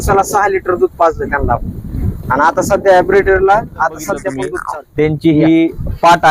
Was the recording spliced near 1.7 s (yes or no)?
no